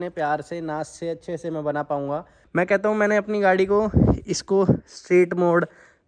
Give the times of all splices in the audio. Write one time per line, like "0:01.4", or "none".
0:02.4